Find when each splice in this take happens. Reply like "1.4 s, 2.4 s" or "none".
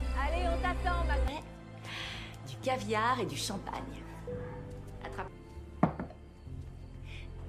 1.2 s